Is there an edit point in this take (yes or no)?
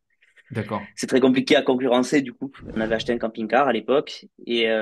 yes